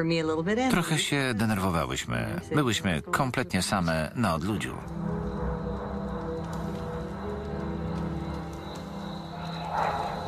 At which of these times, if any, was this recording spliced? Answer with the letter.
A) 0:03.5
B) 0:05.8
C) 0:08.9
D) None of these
C